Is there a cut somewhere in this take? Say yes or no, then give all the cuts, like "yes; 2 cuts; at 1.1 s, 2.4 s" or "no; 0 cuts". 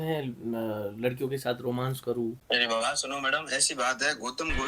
yes; 1 cut; at 2.4 s